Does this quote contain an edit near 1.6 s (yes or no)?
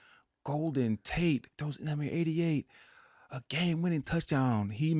yes